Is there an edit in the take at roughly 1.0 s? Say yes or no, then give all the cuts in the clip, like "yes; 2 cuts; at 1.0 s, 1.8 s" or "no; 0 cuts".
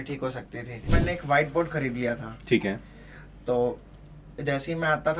yes; 1 cut; at 1.0 s